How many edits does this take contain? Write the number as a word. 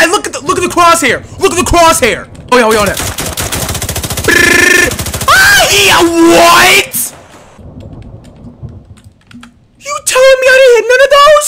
zero